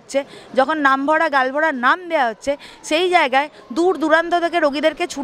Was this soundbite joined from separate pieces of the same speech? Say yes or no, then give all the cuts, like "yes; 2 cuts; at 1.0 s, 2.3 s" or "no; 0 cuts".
no; 0 cuts